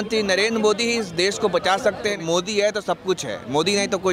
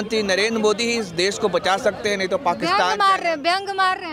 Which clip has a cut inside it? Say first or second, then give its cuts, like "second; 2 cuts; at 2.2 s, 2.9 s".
first; 1 cut; at 2.2 s